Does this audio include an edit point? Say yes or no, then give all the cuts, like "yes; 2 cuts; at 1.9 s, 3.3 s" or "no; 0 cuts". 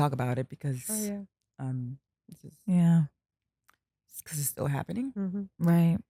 no; 0 cuts